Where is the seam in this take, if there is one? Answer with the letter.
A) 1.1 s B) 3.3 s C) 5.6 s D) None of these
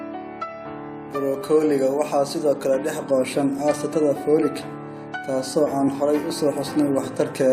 A